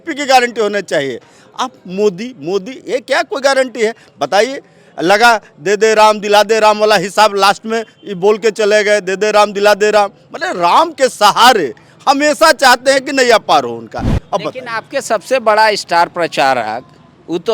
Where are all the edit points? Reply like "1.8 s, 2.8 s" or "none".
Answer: 14.1 s